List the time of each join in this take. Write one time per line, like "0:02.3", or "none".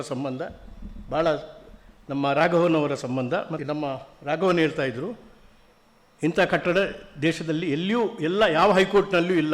0:03.5